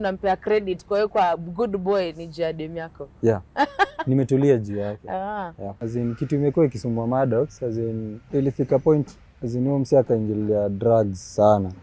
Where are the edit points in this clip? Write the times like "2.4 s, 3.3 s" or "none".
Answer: 5.8 s, 8.2 s